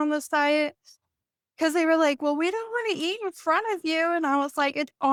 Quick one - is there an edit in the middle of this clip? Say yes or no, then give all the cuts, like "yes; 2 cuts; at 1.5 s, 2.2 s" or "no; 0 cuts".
no; 0 cuts